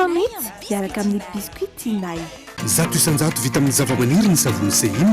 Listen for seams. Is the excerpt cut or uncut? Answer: cut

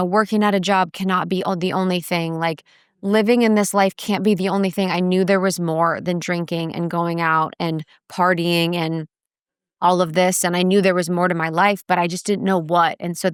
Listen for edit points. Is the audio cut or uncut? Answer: uncut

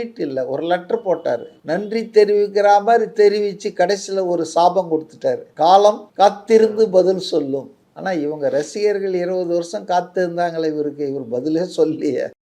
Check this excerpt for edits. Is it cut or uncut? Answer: cut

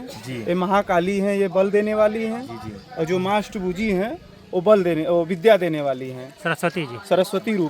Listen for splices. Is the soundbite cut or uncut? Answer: uncut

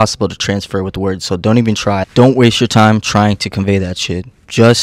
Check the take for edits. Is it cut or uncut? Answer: cut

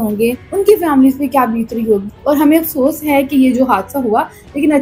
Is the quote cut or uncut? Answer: cut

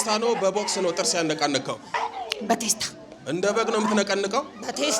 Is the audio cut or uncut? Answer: cut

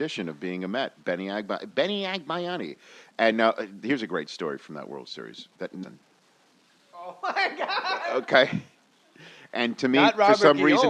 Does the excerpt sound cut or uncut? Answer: uncut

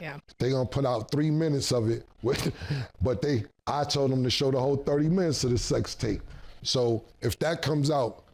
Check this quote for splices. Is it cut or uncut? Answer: uncut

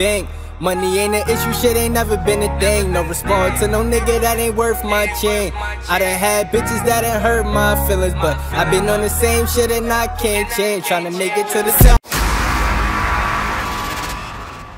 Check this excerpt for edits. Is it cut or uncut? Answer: cut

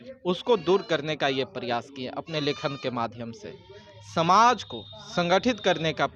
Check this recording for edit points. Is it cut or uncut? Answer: uncut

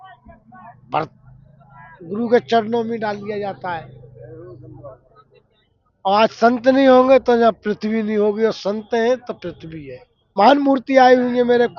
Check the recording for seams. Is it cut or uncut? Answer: cut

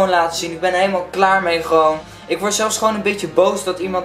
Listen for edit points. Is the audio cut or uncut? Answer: uncut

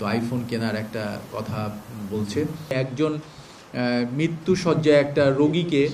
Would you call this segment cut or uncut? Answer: cut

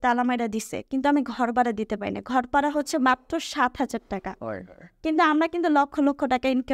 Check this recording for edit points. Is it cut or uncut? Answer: uncut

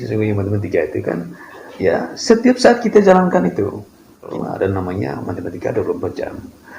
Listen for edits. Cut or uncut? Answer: cut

